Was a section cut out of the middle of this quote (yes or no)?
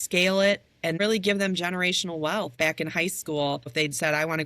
yes